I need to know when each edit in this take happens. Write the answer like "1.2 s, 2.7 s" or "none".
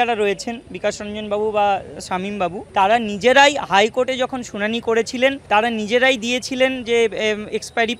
2.6 s, 5.4 s